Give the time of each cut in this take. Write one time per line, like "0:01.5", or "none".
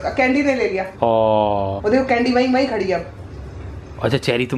0:00.9
0:01.7